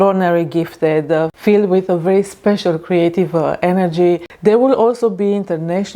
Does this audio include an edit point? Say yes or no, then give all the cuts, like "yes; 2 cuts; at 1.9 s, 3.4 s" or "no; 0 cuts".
yes; 1 cut; at 4.3 s